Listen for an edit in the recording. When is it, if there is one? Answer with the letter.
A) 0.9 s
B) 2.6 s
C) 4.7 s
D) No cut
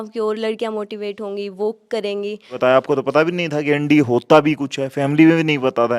B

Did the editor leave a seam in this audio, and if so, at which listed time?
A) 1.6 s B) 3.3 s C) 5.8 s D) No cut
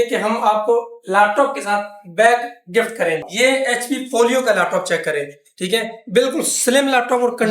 B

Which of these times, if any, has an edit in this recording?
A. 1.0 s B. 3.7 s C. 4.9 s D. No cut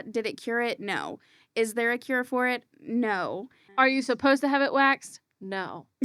B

